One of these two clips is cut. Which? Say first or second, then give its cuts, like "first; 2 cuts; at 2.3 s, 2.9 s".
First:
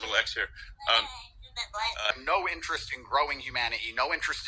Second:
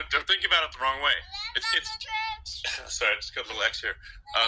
first; 1 cut; at 2.1 s